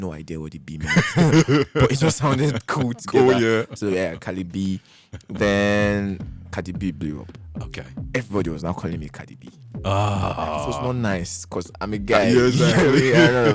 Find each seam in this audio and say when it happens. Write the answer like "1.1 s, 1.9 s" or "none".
none